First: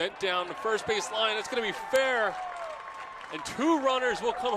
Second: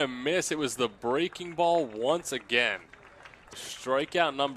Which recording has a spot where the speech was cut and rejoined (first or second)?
second